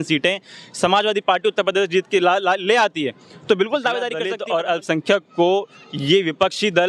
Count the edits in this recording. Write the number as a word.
one